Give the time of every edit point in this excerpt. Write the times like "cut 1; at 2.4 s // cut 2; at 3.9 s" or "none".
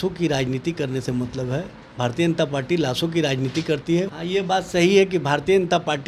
cut 1; at 4.2 s